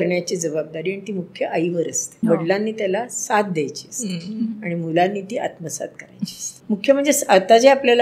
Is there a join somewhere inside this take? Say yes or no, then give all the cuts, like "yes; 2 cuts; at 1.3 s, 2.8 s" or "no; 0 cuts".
yes; 2 cuts; at 2.0 s, 6.5 s